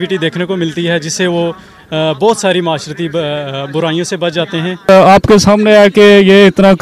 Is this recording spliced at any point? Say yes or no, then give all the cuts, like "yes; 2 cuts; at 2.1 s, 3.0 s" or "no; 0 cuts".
yes; 1 cut; at 4.9 s